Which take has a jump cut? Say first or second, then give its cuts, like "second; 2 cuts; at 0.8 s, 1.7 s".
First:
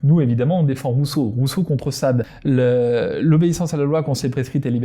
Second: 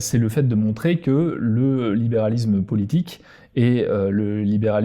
first; 1 cut; at 2.3 s